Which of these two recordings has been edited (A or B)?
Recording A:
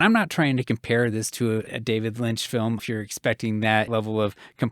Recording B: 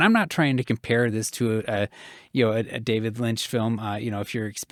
A